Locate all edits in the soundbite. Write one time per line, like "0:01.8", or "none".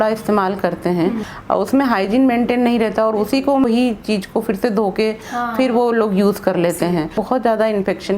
0:01.3
0:03.6
0:07.3